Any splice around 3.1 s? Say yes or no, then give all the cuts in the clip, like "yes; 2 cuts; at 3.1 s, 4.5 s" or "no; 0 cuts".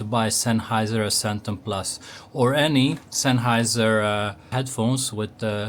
no; 1 cut; at 4.5 s